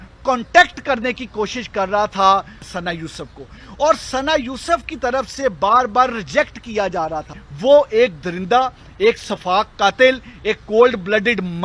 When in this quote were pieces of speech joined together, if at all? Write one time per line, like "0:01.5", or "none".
0:02.7
0:07.4